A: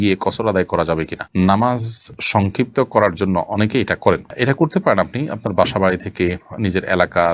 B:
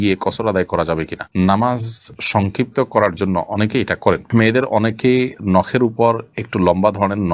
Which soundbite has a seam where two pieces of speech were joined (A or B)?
B